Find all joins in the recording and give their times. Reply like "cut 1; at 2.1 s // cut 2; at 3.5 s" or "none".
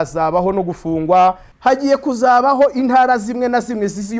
cut 1; at 1.5 s